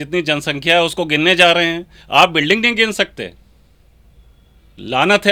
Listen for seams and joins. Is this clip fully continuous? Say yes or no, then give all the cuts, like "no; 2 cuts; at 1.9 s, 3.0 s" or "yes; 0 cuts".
yes; 0 cuts